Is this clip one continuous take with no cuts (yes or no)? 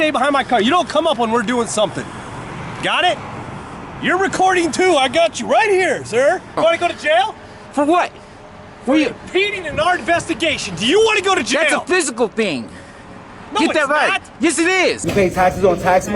no